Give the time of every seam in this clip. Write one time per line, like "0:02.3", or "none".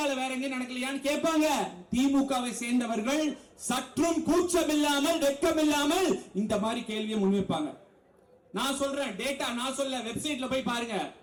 none